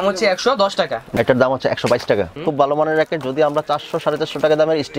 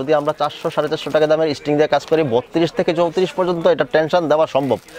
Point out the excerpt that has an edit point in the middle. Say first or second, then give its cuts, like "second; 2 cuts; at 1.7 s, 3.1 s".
first; 2 cuts; at 1.0 s, 2.3 s